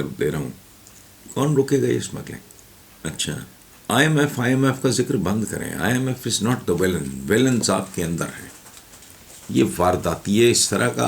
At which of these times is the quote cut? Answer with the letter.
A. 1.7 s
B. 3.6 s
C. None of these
B